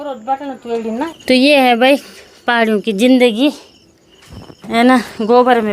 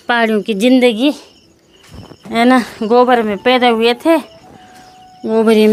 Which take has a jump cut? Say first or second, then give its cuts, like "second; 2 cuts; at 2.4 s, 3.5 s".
first; 1 cut; at 1.1 s